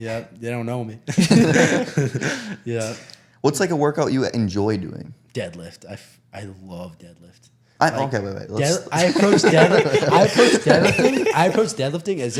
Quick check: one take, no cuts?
yes; 0 cuts

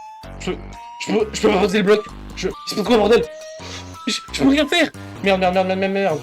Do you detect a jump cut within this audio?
yes; 2 cuts; at 2.6 s, 5.1 s

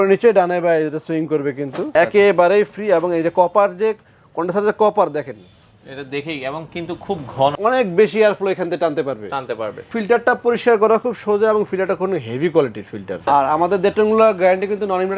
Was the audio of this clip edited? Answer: yes; 4 cuts; at 1.9 s, 7.5 s, 10.0 s, 13.3 s

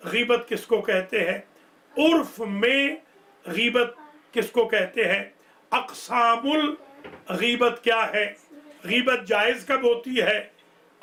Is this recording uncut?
yes; 0 cuts

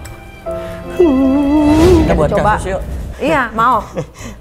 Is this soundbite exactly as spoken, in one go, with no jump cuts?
no; 1 cut; at 2.1 s

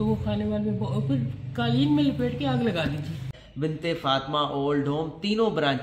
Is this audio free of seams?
no; 1 cut; at 3.3 s

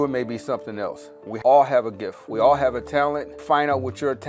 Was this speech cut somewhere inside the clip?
yes; 1 cut; at 1.4 s

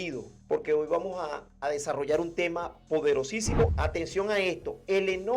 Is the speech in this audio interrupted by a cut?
yes; 1 cut; at 3.7 s

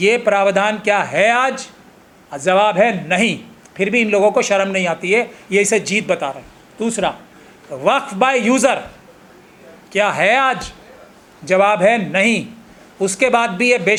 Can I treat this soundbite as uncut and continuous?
yes; 0 cuts

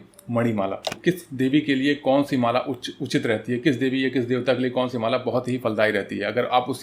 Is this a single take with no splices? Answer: no; 1 cut; at 0.9 s

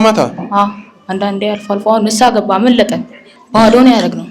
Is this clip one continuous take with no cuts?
no; 1 cut; at 3.3 s

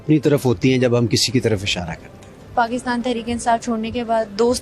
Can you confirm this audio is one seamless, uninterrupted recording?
no; 1 cut; at 2.5 s

